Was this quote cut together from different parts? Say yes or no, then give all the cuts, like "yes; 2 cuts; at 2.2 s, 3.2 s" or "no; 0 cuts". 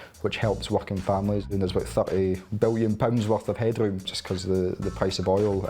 yes; 2 cuts; at 1.5 s, 4.2 s